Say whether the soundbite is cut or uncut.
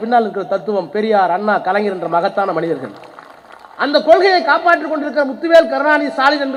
uncut